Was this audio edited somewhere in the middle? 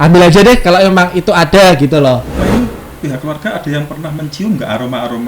yes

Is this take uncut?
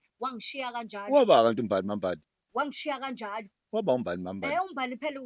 yes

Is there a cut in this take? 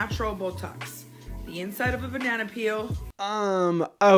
yes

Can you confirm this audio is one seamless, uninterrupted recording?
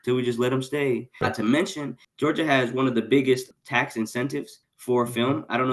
no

